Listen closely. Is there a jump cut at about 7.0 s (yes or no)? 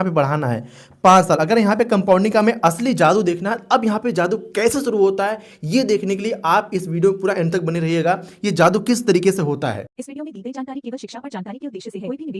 no